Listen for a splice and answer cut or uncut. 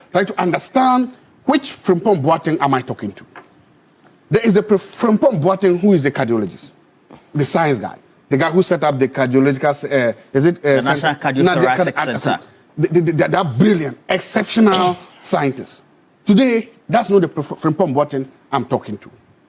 uncut